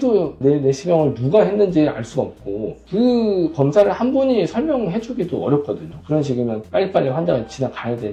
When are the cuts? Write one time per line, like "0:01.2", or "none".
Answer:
none